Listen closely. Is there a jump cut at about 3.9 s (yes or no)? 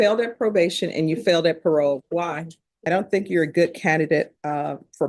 no